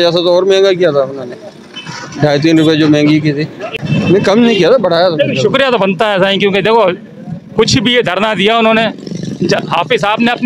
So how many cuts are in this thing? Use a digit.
0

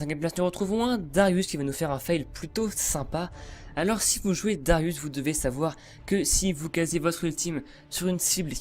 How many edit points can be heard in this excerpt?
1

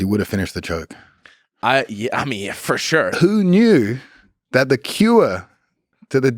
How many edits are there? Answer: 1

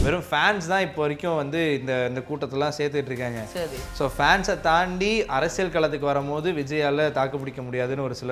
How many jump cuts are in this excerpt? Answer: 0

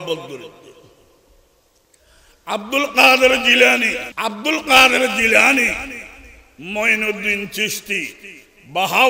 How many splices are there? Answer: 1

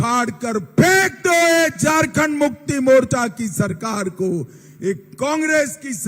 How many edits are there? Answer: 0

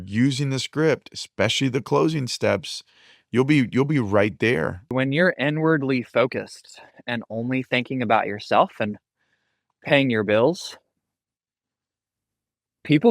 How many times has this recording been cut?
1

